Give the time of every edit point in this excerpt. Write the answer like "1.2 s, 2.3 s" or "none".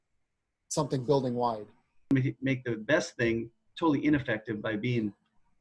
2.1 s